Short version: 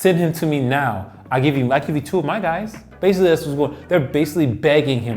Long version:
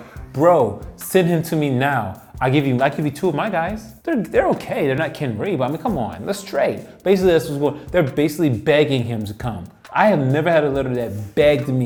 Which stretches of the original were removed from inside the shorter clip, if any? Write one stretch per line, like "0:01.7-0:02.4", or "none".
0:03.9-0:06.9